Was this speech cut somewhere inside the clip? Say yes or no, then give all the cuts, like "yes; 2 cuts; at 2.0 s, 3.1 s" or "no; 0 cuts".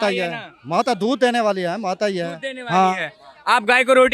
no; 0 cuts